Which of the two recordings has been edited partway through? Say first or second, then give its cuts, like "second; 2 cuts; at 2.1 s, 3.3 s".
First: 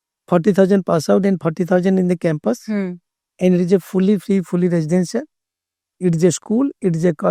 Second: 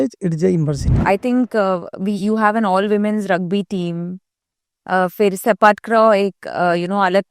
second; 1 cut; at 0.9 s